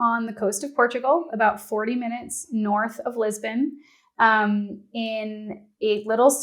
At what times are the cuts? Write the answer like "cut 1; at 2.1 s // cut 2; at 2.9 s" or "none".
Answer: none